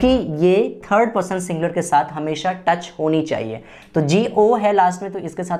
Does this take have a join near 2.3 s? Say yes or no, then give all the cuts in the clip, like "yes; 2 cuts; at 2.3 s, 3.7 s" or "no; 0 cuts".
no; 0 cuts